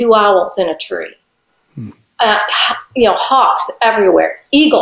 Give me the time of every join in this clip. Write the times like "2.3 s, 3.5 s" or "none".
none